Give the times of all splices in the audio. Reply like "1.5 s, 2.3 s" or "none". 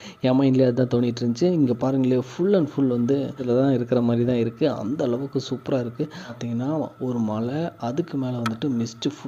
3.4 s, 6.3 s